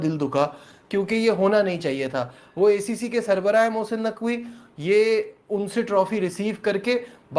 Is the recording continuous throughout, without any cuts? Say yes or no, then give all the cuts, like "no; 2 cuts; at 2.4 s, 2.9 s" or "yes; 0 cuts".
yes; 0 cuts